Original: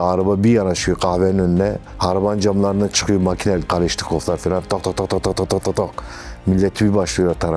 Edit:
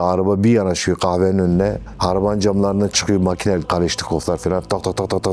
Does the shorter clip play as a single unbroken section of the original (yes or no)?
yes